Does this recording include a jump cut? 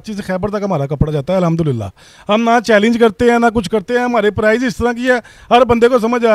no; 0 cuts

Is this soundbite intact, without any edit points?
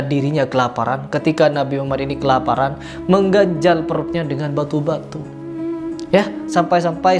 yes; 0 cuts

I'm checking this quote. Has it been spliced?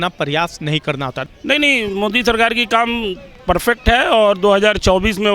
yes; 1 cut; at 1.2 s

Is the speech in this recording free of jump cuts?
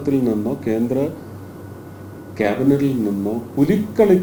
yes; 0 cuts

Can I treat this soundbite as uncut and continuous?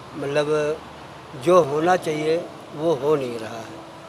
yes; 0 cuts

